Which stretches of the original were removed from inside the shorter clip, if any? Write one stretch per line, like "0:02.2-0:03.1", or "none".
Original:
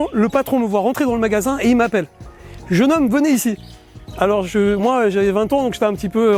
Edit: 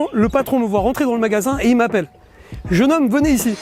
none